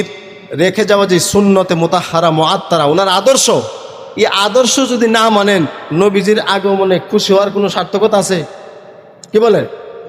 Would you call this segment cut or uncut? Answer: uncut